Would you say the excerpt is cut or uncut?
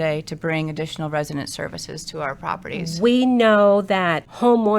cut